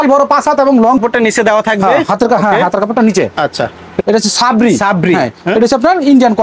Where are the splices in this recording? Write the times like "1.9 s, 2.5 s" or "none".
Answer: 1.0 s, 4.0 s